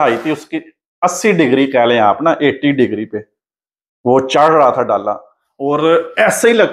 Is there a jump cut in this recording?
no; 0 cuts

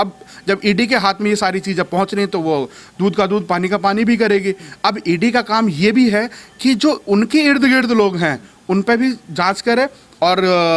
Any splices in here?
no; 0 cuts

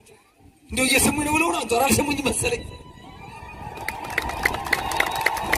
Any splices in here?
no; 0 cuts

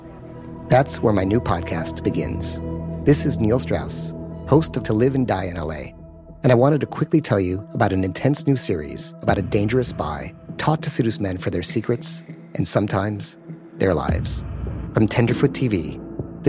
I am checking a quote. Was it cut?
no; 0 cuts

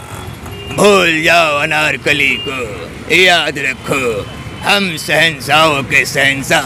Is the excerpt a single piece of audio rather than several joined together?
yes; 0 cuts

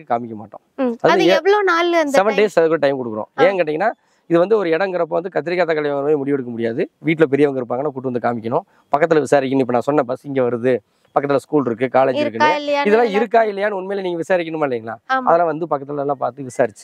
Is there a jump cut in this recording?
no; 0 cuts

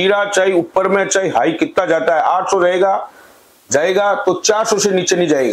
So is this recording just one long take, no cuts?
yes; 0 cuts

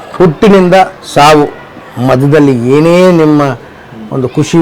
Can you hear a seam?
yes; 1 cut; at 1.0 s

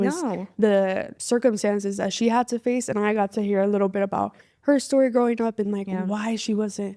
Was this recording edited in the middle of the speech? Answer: yes; 1 cut; at 1.1 s

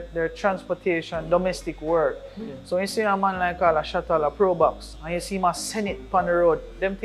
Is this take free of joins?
no; 1 cut; at 4.9 s

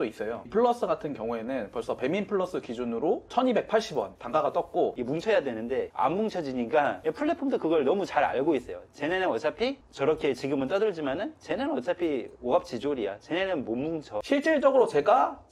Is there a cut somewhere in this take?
yes; 2 cuts; at 5.0 s, 14.2 s

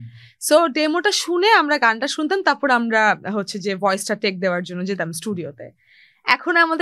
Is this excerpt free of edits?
yes; 0 cuts

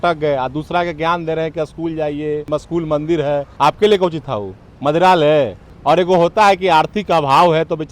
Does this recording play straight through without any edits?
no; 3 cuts; at 2.5 s, 3.5 s, 5.6 s

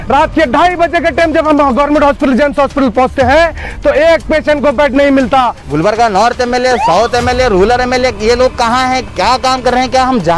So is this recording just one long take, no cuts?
no; 1 cut; at 5.6 s

